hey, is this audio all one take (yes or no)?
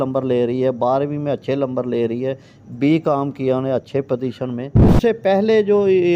no